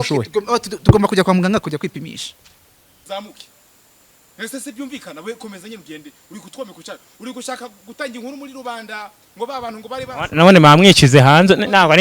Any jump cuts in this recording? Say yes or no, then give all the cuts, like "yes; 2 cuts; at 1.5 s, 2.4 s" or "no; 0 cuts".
yes; 1 cut; at 2.9 s